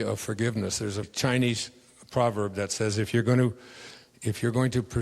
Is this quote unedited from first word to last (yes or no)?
no